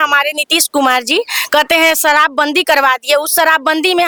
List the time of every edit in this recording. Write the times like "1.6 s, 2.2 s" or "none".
none